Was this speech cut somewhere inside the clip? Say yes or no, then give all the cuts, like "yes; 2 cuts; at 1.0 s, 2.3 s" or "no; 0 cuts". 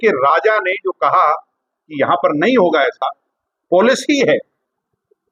no; 0 cuts